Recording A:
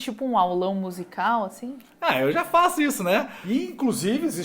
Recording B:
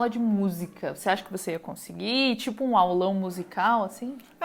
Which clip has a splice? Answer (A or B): A